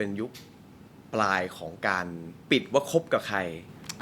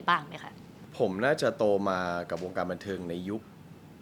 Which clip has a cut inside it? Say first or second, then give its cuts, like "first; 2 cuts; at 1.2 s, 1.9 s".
first; 1 cut; at 2.3 s